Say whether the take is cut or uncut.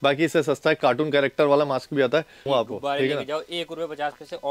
cut